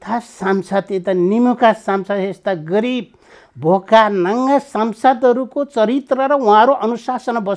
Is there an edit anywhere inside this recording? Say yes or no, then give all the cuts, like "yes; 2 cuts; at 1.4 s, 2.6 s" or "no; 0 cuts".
no; 0 cuts